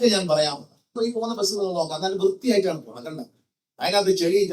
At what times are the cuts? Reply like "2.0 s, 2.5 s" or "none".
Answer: 0.9 s